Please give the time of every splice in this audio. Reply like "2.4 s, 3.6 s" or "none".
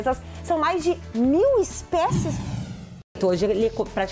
2.6 s